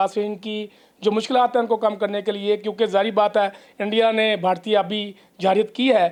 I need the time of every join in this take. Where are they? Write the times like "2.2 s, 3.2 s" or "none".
none

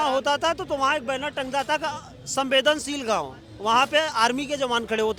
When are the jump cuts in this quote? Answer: none

